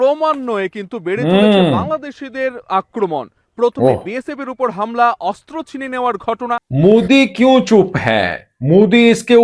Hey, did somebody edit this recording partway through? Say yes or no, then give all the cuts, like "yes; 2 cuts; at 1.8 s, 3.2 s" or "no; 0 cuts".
yes; 1 cut; at 6.7 s